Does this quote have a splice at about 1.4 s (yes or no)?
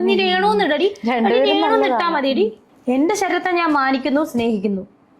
no